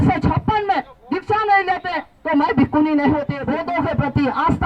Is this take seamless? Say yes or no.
no